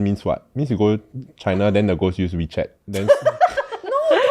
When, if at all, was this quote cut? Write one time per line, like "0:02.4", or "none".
0:02.8